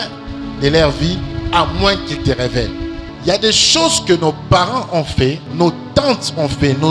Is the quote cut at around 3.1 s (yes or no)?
yes